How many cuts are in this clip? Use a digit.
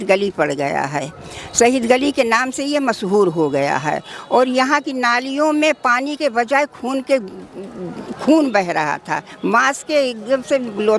0